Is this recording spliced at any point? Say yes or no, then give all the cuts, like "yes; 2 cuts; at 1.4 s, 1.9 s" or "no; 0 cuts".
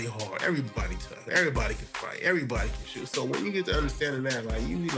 no; 0 cuts